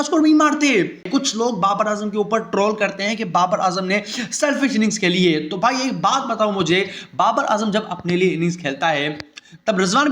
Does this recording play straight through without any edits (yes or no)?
no